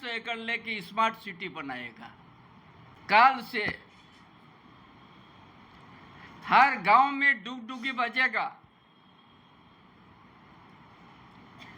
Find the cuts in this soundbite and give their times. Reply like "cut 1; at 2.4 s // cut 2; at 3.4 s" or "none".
cut 1; at 2.9 s